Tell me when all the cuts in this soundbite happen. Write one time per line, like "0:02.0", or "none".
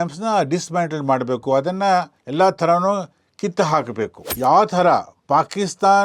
0:04.2